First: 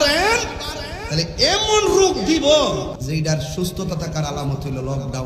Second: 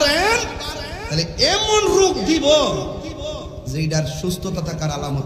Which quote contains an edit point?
first; 1 cut; at 3.0 s

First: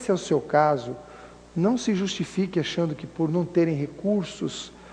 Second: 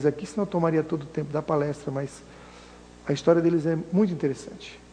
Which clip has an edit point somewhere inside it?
second; 1 cut; at 3.3 s

